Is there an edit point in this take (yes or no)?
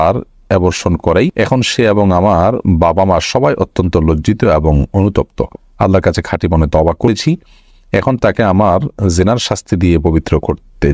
yes